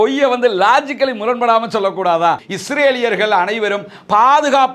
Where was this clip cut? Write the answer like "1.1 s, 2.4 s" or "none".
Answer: 2.5 s